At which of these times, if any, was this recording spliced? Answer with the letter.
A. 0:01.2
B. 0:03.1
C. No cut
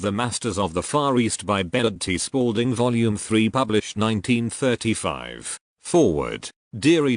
B